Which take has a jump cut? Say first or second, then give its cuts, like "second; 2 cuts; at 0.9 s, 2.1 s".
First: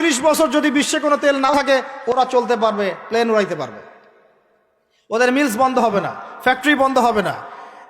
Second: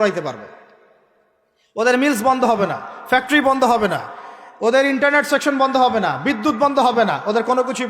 first; 1 cut; at 1.5 s